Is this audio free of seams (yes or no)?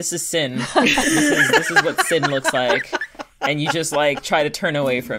yes